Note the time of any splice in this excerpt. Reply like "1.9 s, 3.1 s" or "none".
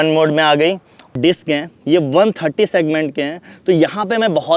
1.1 s